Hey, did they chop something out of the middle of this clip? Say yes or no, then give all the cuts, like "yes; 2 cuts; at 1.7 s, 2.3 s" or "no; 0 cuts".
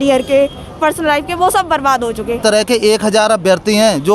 yes; 1 cut; at 2.4 s